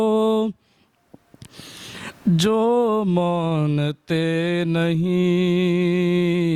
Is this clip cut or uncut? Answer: uncut